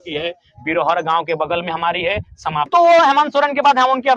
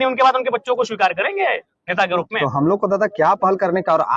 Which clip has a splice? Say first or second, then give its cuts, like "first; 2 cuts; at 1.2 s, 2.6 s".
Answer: first; 1 cut; at 2.7 s